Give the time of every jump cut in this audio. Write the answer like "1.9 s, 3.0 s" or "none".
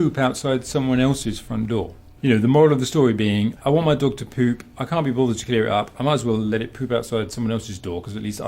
2.0 s, 3.6 s